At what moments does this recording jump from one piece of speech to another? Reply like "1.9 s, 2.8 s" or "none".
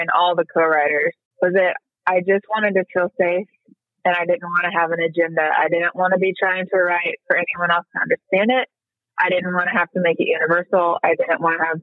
1.2 s